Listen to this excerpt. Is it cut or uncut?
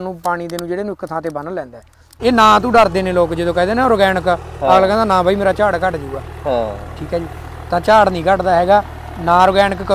cut